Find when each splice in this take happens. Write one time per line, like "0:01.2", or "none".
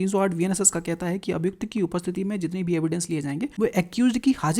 0:03.5

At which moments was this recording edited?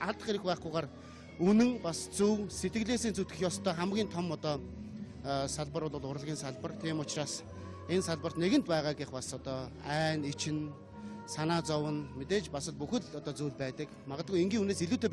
0:01.4

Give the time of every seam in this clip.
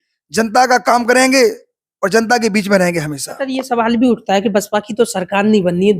0:03.3

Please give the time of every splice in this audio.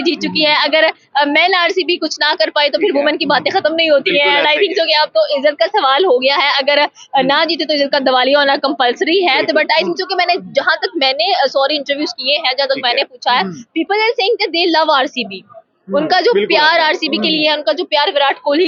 none

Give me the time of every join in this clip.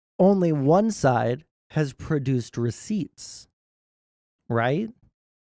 none

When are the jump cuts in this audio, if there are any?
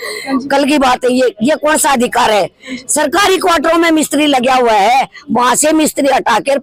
none

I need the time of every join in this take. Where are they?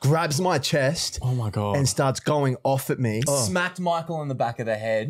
0:03.2

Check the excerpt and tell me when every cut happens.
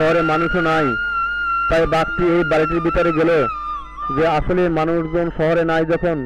none

